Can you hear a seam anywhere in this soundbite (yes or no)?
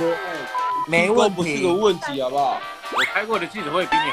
yes